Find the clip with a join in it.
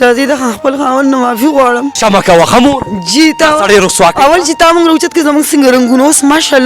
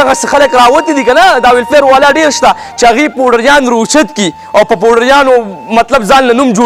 first; 1 cut; at 1.9 s

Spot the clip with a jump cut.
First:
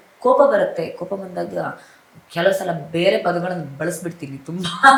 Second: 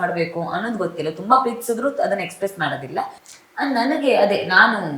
second; 1 cut; at 3.2 s

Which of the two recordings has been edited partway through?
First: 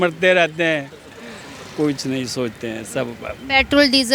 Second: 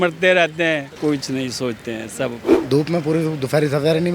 second; 2 cuts; at 0.9 s, 2.5 s

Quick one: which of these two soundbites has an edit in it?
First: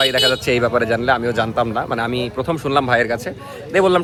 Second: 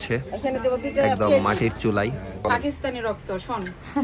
second; 1 cut; at 2.4 s

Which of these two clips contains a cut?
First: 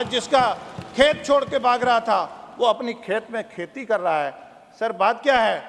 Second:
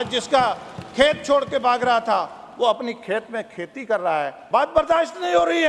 second; 1 cut; at 4.4 s

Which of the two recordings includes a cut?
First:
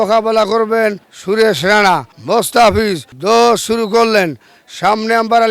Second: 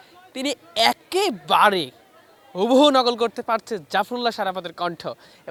first; 3 cuts; at 1.1 s, 2.1 s, 3.1 s

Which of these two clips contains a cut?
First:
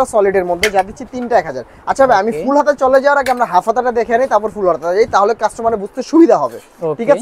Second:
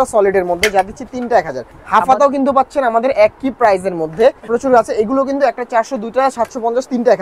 second; 2 cuts; at 1.7 s, 4.5 s

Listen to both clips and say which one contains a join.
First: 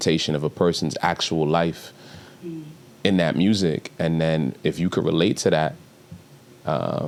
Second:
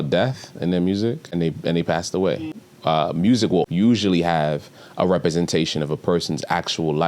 second; 3 cuts; at 1.2 s, 2.7 s, 3.7 s

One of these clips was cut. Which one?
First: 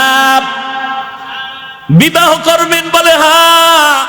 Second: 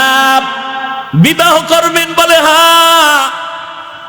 second; 1 cut; at 1.0 s

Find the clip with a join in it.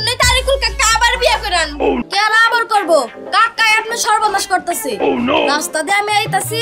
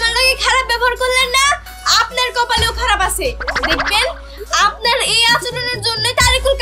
first; 1 cut; at 2.0 s

